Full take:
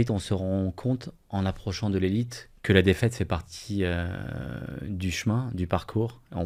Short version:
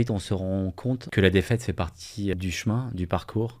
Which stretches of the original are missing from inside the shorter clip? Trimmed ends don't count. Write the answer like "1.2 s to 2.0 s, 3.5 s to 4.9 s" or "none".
1.1 s to 2.6 s, 3.9 s to 4.9 s